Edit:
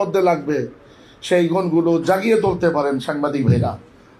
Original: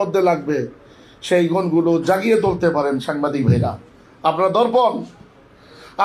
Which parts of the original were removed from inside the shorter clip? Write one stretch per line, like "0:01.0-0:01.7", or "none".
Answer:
none